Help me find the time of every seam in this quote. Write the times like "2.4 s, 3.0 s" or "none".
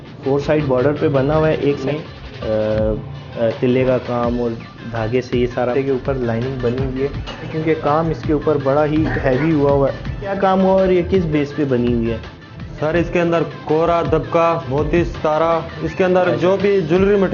1.8 s, 3.2 s, 5.7 s, 7.5 s, 10.3 s, 14.6 s

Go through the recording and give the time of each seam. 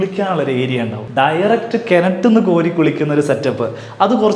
1.0 s

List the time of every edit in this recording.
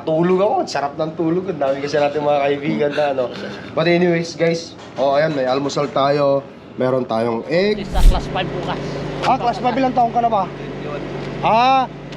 7.9 s

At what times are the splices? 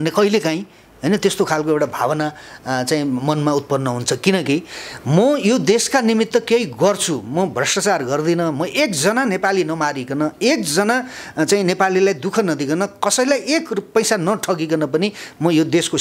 none

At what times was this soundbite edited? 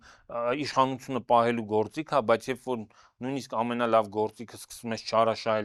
none

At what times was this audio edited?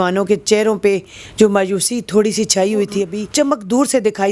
3.2 s

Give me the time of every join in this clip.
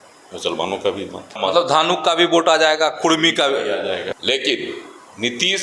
1.4 s, 4.1 s

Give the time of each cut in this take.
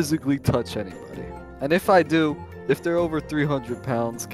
2.5 s

